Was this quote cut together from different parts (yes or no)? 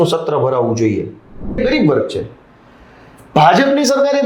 yes